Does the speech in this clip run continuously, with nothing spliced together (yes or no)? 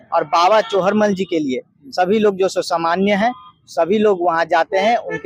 yes